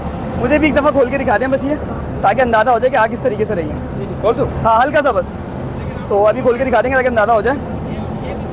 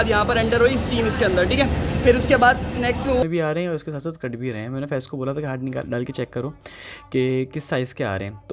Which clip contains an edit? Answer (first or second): second